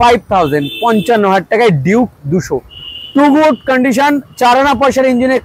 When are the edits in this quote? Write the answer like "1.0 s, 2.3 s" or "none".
none